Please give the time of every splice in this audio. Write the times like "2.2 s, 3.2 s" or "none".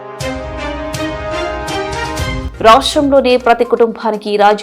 none